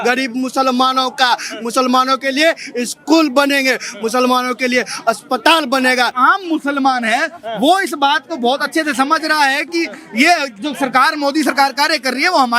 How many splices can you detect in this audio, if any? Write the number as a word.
one